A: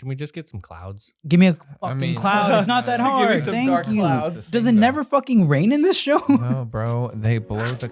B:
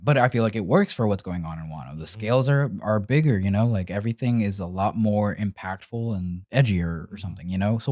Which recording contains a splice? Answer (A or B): B